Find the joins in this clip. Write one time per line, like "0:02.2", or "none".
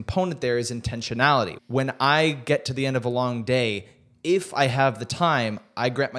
0:01.6